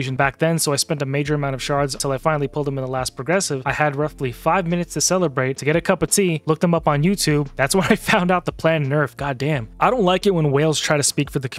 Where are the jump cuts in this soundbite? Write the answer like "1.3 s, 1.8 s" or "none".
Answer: none